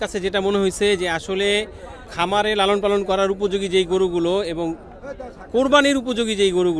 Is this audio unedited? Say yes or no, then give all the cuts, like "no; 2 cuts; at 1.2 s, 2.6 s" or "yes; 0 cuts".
no; 1 cut; at 2.1 s